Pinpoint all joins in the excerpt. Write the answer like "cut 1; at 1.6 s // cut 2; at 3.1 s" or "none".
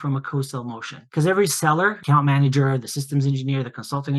cut 1; at 1.0 s // cut 2; at 2.0 s